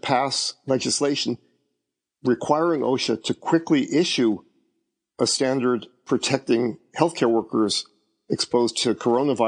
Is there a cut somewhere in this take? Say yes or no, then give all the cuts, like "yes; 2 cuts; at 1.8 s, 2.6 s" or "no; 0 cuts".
no; 0 cuts